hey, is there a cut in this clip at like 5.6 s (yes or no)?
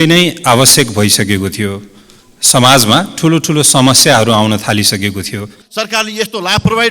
yes